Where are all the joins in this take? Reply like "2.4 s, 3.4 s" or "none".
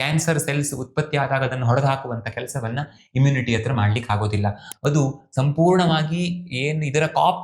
4.7 s